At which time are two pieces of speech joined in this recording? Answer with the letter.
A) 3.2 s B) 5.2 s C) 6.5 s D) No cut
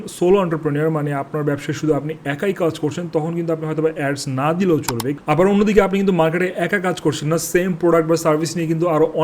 B